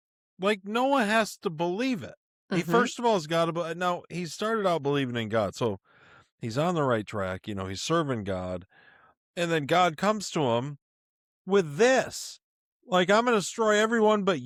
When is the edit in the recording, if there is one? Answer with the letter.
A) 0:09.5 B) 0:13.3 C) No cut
C